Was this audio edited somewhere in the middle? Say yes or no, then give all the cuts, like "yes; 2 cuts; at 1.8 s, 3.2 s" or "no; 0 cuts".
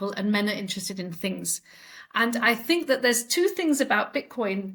no; 0 cuts